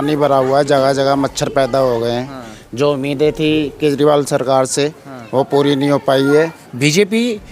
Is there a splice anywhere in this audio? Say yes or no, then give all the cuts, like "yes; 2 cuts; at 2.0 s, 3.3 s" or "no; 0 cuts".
yes; 1 cut; at 6.6 s